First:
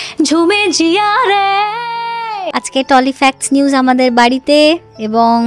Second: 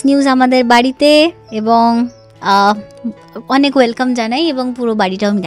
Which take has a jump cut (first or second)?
first